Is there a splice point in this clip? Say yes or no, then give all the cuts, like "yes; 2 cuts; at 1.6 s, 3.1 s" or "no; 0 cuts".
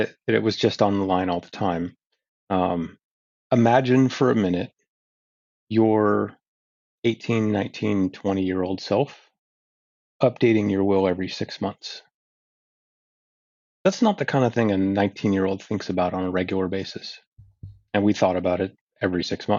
no; 0 cuts